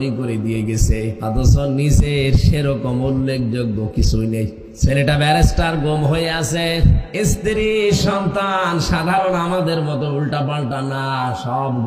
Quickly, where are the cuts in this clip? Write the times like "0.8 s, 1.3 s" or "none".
1.1 s, 4.6 s, 7.0 s